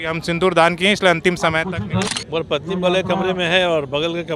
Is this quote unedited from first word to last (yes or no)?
no